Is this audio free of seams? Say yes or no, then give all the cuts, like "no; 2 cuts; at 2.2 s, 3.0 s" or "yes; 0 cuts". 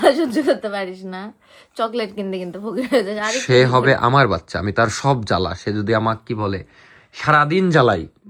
yes; 0 cuts